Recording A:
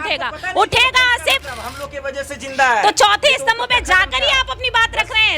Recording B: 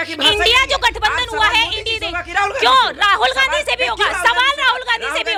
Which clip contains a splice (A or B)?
A